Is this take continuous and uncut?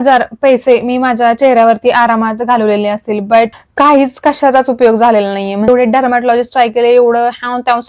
no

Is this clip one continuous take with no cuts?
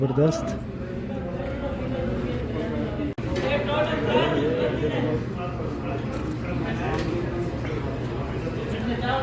yes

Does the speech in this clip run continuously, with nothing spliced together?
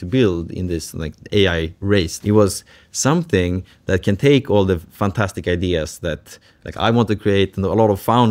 no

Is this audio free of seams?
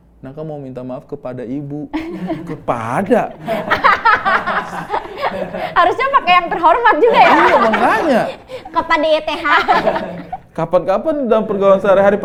yes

